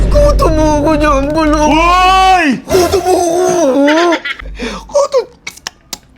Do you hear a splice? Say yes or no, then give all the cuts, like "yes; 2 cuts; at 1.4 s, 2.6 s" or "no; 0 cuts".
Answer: yes; 1 cut; at 4.3 s